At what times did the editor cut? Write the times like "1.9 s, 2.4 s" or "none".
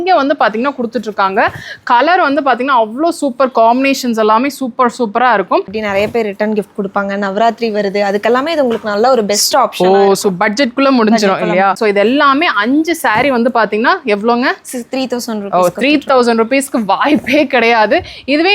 5.8 s, 11.8 s